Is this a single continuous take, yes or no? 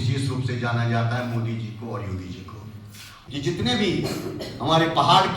no